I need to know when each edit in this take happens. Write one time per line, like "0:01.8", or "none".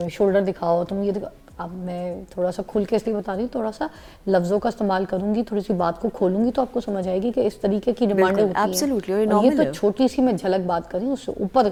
none